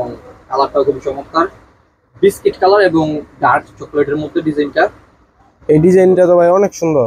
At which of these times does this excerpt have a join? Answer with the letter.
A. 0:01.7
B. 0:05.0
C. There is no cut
C